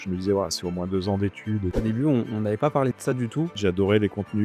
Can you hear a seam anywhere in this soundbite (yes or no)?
yes